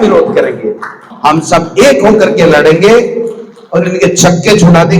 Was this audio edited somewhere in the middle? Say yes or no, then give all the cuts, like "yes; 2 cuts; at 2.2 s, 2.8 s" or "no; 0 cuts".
yes; 1 cut; at 1.1 s